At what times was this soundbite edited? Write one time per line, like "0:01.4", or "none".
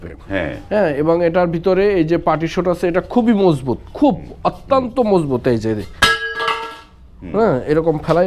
none